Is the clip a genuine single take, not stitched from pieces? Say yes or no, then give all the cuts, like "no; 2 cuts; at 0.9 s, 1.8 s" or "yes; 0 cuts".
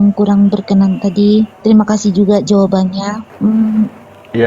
no; 2 cuts; at 1.5 s, 3.3 s